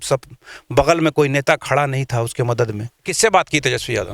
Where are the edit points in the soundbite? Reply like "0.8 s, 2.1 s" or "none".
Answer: 3.1 s